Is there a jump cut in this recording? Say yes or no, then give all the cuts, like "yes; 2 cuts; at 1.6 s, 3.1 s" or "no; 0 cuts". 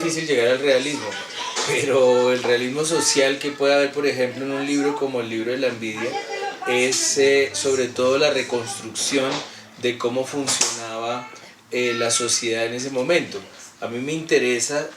yes; 1 cut; at 13.6 s